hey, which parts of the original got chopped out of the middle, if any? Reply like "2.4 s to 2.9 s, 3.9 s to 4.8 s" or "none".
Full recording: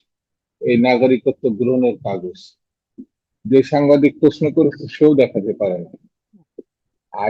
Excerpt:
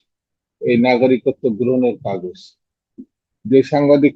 none